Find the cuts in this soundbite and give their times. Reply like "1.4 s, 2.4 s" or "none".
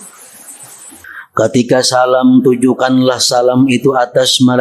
1.1 s